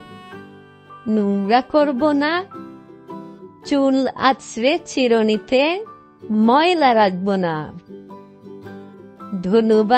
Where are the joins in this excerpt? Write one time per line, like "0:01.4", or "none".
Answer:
none